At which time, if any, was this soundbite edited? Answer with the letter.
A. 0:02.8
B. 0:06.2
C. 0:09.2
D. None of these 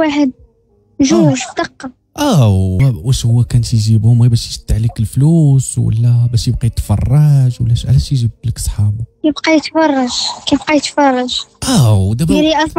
A